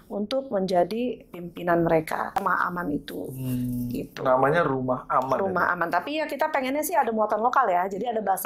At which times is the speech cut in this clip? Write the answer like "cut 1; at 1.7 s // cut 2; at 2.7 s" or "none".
cut 1; at 2.4 s